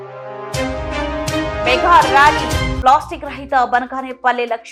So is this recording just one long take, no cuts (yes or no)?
yes